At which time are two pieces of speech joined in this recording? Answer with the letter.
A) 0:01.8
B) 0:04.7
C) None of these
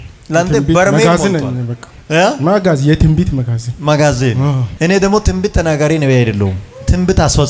B